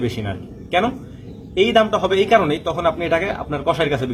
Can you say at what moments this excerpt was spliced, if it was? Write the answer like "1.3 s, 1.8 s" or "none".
none